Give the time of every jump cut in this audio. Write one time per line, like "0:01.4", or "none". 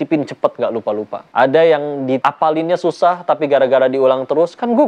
0:01.2
0:02.2